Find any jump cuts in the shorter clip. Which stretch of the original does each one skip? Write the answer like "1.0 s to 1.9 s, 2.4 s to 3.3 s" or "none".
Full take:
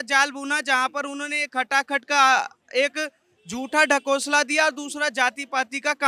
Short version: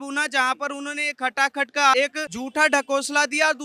2.3 s to 3.1 s